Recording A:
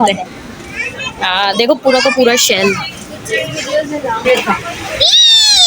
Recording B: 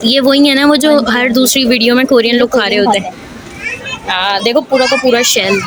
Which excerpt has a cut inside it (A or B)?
A